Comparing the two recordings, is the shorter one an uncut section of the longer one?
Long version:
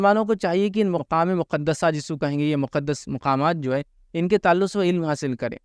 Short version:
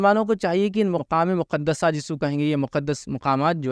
yes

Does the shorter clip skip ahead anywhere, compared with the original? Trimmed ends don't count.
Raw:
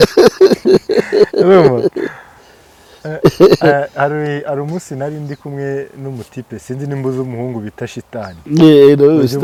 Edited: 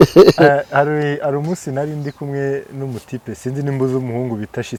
no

